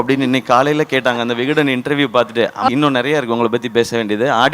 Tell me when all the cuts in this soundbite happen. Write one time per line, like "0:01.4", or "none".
0:02.7